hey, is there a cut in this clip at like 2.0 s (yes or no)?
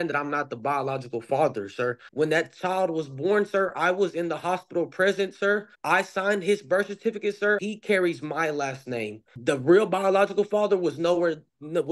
yes